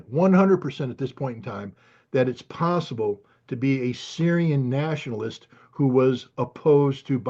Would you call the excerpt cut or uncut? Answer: uncut